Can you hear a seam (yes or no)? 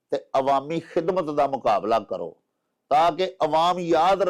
no